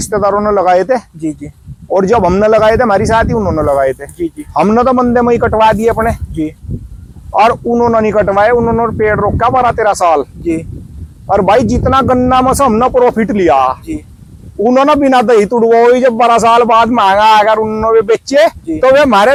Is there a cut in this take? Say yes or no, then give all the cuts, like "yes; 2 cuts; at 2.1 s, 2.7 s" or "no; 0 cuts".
no; 0 cuts